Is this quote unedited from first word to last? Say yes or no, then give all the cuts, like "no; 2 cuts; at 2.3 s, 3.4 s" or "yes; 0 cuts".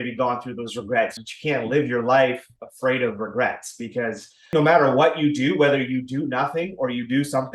no; 2 cuts; at 1.2 s, 4.5 s